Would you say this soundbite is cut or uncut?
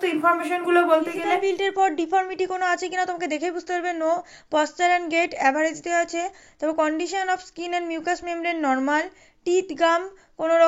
cut